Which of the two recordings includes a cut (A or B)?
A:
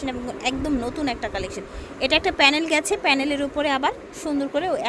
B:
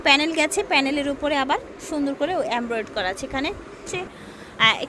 B